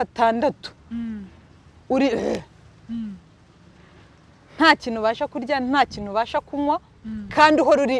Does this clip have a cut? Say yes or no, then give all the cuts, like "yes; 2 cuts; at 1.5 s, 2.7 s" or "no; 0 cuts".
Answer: no; 0 cuts